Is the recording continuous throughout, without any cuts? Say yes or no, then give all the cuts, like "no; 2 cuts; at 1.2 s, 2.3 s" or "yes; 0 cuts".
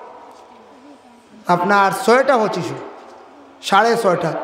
yes; 0 cuts